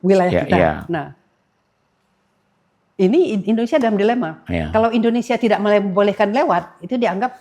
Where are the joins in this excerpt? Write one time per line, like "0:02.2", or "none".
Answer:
none